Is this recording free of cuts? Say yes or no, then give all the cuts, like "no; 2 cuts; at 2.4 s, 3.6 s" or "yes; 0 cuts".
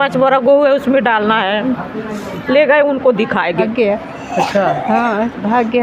no; 1 cut; at 3.6 s